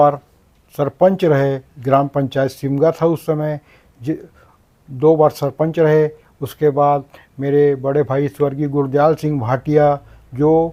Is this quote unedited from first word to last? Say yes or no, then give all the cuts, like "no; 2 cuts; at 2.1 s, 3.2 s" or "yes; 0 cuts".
yes; 0 cuts